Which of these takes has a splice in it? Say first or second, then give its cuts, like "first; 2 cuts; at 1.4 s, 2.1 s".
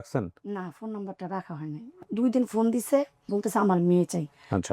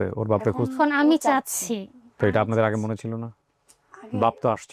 first; 2 cuts; at 1.9 s, 3.2 s